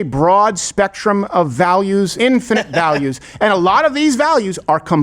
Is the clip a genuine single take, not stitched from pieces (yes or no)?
no